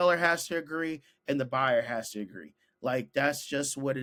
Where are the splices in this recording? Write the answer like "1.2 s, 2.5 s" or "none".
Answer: none